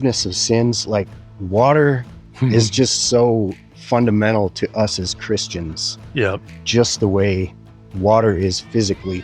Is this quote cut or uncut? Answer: uncut